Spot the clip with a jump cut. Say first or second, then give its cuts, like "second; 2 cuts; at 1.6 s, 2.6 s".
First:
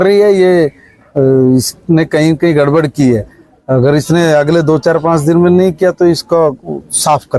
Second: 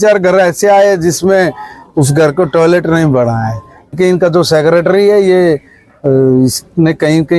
second; 1 cut; at 3.9 s